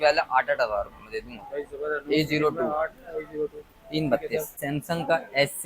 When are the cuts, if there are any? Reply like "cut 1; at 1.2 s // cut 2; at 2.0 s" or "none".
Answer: cut 1; at 4.6 s